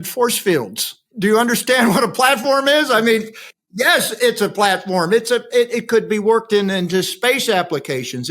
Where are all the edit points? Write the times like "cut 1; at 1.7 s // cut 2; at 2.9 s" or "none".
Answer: cut 1; at 1.1 s